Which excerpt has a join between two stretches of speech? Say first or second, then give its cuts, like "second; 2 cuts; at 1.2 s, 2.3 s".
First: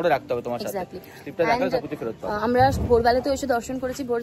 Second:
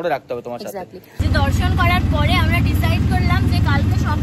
second; 1 cut; at 1.2 s